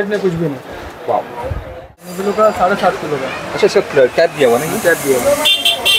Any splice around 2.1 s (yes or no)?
yes